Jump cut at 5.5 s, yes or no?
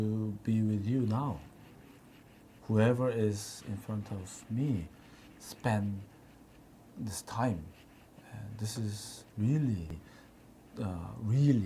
no